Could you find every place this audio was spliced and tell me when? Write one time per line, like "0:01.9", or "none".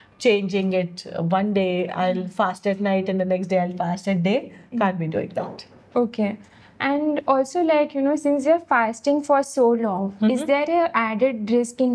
none

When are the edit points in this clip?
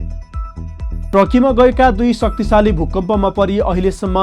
0:01.1

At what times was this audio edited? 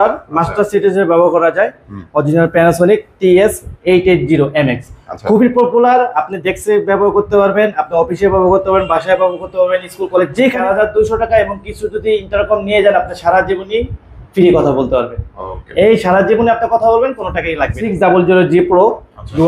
0:10.6
0:17.8

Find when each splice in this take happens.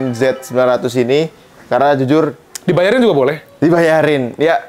none

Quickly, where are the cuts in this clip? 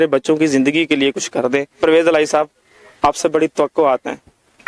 none

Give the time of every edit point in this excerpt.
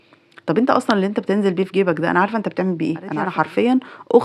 0:03.2

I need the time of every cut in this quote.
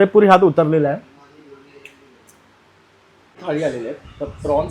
0:03.4

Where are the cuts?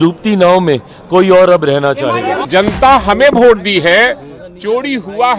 0:02.5

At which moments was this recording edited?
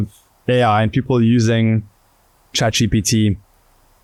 none

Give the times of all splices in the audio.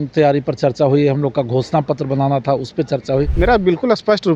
0:03.3

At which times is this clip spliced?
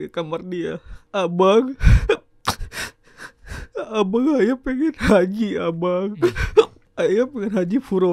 0:00.9
0:02.3
0:06.8

